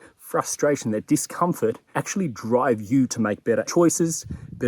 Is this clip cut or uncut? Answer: cut